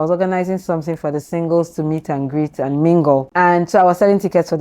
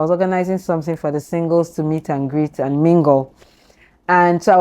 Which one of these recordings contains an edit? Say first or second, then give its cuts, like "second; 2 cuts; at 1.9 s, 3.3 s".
first; 1 cut; at 3.3 s